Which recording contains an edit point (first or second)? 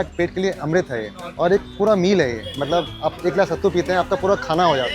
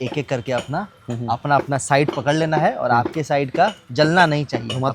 first